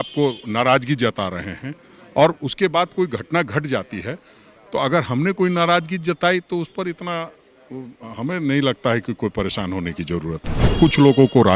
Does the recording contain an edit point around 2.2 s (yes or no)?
no